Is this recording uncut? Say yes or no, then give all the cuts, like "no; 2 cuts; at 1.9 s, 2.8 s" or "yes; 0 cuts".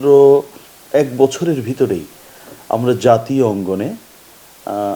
yes; 0 cuts